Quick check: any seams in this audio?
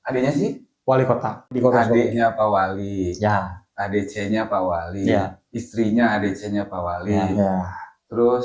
yes; 1 cut; at 1.6 s

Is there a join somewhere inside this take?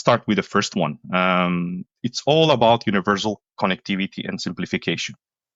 no; 0 cuts

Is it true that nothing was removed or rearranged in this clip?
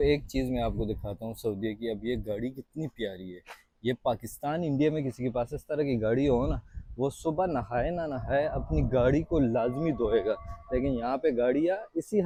yes; 0 cuts

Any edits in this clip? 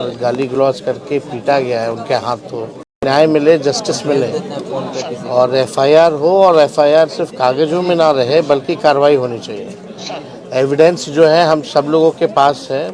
yes; 1 cut; at 2.8 s

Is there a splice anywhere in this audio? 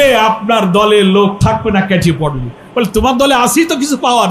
no; 0 cuts

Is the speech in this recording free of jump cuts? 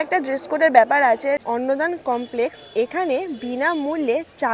no; 1 cut; at 1.4 s

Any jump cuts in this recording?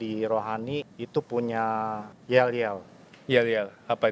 yes; 2 cuts; at 1.0 s, 2.1 s

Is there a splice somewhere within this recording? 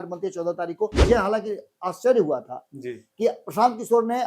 yes; 1 cut; at 1.0 s

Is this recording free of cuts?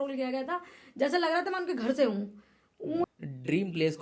no; 1 cut; at 3.0 s

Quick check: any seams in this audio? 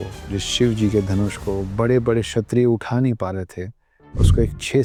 no; 0 cuts

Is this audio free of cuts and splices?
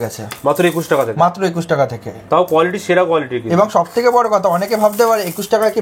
yes; 0 cuts

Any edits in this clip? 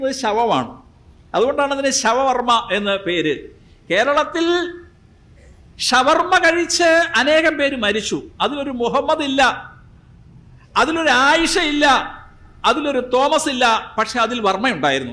no; 0 cuts

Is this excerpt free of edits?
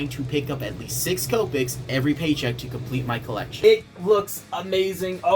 no; 1 cut; at 3.6 s

